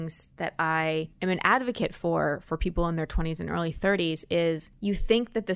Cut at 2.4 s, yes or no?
no